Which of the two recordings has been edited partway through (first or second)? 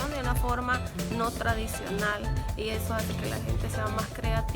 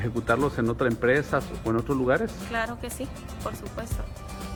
first